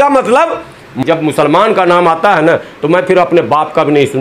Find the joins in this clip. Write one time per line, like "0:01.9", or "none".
0:01.0